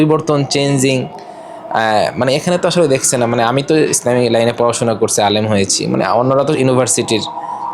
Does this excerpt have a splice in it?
no; 0 cuts

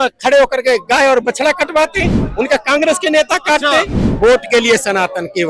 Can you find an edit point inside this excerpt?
yes; 1 cut; at 4.0 s

